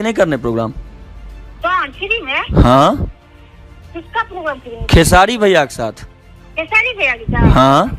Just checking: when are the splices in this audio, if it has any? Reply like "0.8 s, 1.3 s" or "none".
none